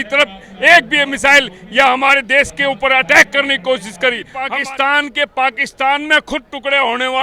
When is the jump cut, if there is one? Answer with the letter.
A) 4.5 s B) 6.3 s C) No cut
A